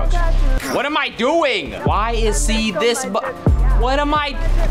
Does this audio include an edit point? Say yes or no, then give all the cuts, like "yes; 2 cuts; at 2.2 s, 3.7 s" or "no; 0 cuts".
no; 0 cuts